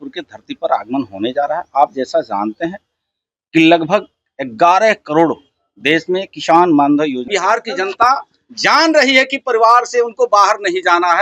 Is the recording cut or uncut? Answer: cut